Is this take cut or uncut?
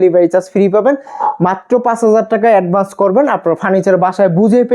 uncut